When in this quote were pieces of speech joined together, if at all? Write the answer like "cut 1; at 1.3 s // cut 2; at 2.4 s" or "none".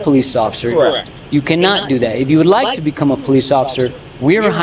none